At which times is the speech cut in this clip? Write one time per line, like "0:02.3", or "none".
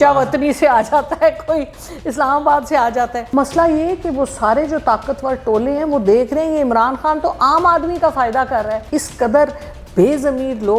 0:03.2
0:08.8

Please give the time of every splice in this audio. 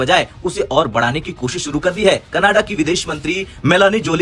none

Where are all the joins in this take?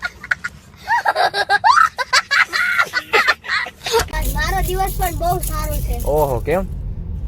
0:04.1

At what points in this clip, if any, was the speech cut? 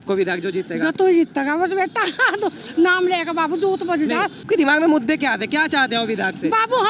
none

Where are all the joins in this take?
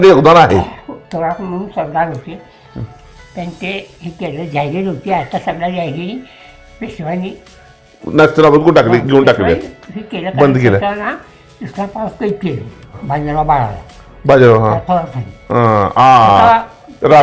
0:12.9

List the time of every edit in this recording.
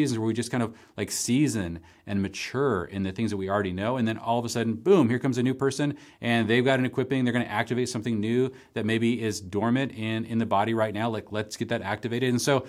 none

